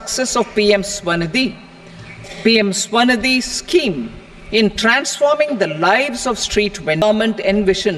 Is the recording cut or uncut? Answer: cut